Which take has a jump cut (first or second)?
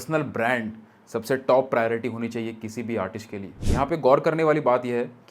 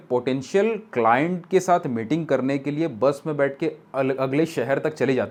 first